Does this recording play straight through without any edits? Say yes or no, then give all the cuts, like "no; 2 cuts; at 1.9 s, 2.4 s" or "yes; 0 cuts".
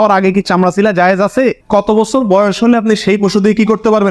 no; 1 cut; at 1.6 s